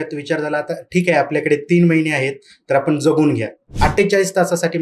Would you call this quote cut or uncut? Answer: cut